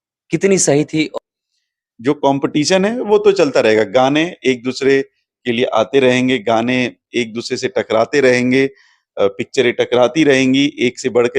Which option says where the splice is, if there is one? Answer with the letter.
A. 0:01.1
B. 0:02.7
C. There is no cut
A